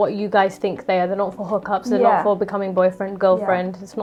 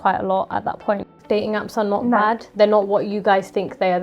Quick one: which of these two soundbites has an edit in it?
second; 1 cut; at 1.1 s

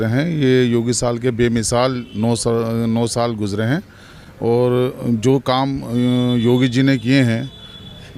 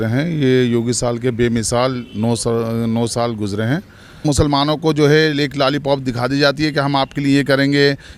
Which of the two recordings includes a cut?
second; 1 cut; at 4.2 s

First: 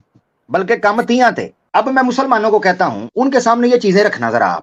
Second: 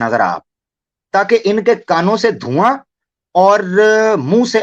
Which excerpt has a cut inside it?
first; 2 cuts; at 1.5 s, 3.0 s

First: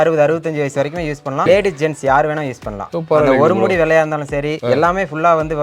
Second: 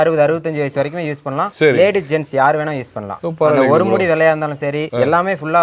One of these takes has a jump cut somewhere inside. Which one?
first; 1 cut; at 1.5 s

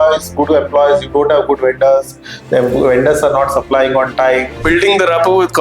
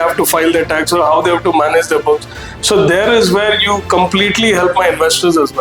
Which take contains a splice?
first; 1 cut; at 4.6 s

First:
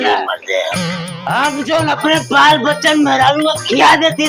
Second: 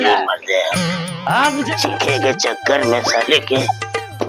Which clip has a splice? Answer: second; 1 cut; at 1.7 s

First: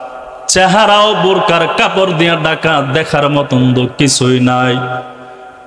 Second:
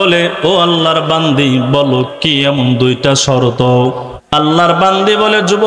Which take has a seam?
second; 1 cut; at 4.1 s

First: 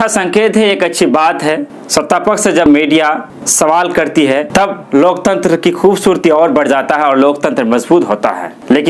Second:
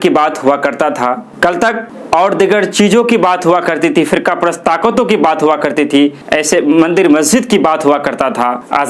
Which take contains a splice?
first; 3 cuts; at 1.7 s, 2.7 s, 4.5 s

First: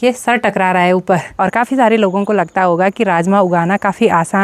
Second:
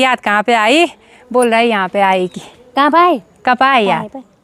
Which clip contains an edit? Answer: first; 1 cut; at 1.3 s

